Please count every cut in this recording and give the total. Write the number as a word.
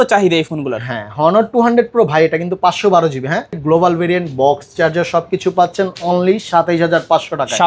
one